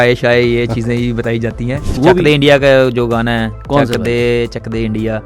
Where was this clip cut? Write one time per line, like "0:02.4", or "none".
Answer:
0:02.0